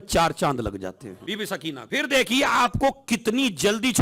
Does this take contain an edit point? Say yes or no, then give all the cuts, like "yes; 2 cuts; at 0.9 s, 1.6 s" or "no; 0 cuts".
yes; 2 cuts; at 1.0 s, 1.8 s